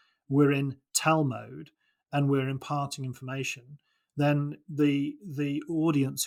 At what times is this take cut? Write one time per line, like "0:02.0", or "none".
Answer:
none